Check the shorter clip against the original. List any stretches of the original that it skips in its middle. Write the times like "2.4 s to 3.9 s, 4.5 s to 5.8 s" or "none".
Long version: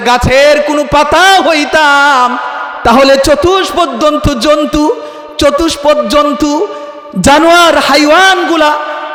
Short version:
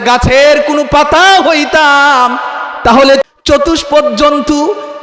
3.2 s to 5.2 s